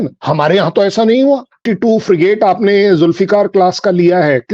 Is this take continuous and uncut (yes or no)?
no